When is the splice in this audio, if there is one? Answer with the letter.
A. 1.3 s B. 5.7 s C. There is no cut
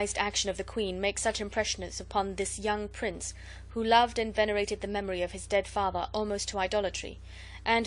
B